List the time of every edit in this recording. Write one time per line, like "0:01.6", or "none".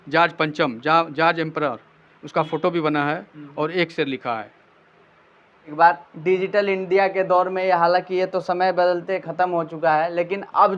0:05.7